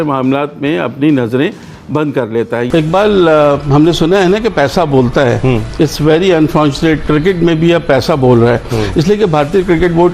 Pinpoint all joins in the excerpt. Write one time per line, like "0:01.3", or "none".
0:02.7